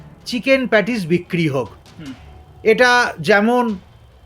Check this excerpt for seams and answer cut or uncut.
uncut